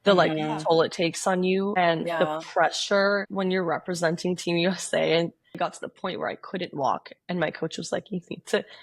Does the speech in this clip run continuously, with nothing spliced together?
no; 1 cut; at 5.5 s

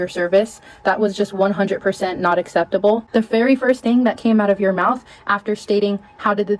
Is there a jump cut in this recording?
yes; 1 cut; at 3.0 s

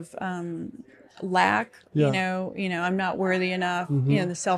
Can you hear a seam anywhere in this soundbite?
no; 0 cuts

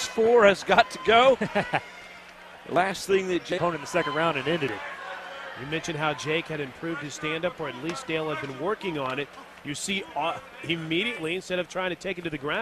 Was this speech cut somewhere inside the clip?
no; 0 cuts

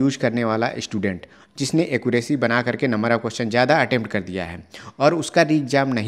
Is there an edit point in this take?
no; 0 cuts

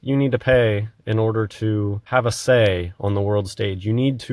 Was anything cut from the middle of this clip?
yes; 1 cut; at 2.0 s

